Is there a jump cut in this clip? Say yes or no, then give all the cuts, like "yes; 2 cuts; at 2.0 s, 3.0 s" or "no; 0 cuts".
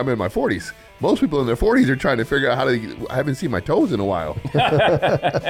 no; 0 cuts